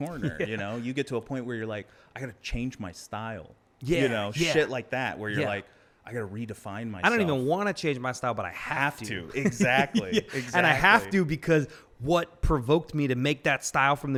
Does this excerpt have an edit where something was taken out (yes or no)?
no